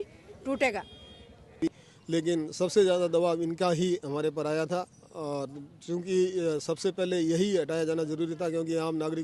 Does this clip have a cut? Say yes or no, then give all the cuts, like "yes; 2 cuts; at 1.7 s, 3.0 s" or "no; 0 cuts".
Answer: yes; 1 cut; at 1.6 s